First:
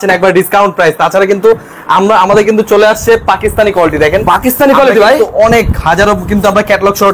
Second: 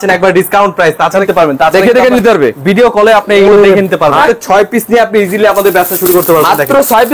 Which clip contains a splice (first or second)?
second